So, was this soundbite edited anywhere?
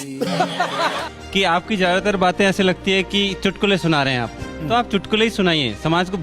yes; 1 cut; at 1.1 s

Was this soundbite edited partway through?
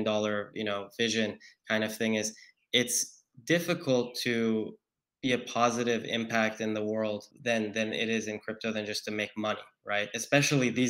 no; 0 cuts

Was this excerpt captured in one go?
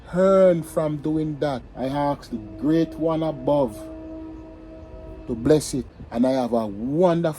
no; 2 cuts; at 1.7 s, 6.0 s

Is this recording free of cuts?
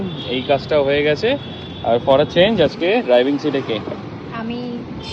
yes; 0 cuts

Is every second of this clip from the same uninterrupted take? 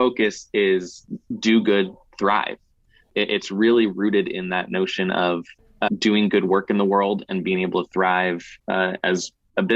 yes; 0 cuts

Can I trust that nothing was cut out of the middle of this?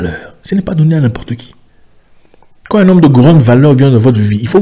yes; 0 cuts

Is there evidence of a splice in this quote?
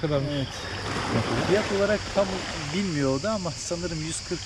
no; 0 cuts

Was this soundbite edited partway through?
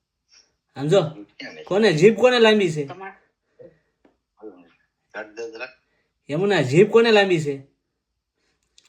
no; 0 cuts

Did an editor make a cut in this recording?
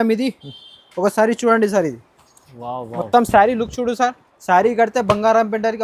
no; 0 cuts

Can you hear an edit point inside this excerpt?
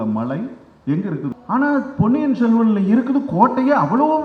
yes; 1 cut; at 1.3 s

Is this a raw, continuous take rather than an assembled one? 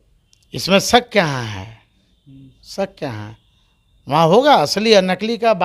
yes; 0 cuts

